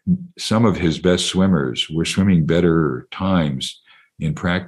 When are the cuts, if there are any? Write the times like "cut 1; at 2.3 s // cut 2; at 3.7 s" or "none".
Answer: none